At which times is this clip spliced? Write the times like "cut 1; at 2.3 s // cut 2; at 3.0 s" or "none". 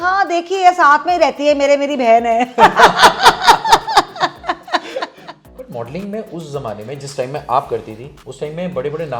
cut 1; at 5.1 s